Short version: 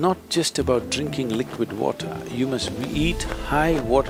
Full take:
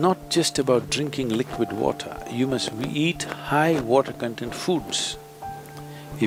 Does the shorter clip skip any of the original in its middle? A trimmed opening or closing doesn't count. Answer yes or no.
no